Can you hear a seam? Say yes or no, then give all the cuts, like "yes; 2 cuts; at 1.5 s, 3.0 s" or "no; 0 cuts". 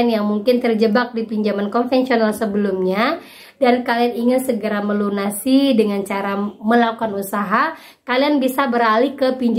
no; 0 cuts